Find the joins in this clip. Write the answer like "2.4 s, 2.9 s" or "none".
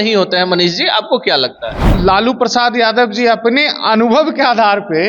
1.9 s